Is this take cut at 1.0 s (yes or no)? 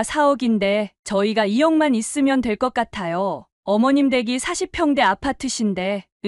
yes